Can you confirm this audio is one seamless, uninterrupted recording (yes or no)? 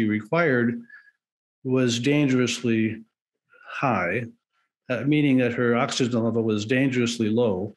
yes